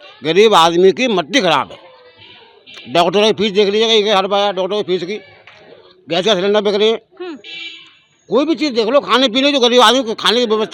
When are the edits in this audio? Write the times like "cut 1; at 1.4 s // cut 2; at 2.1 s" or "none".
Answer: none